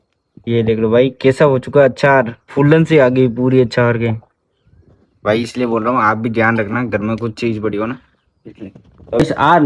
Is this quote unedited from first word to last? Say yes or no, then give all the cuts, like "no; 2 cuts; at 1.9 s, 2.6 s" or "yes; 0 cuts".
yes; 0 cuts